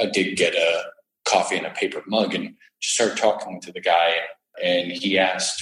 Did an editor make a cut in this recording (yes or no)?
yes